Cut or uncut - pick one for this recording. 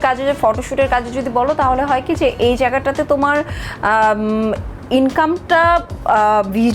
uncut